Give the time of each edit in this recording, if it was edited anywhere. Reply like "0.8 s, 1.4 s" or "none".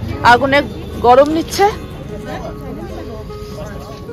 none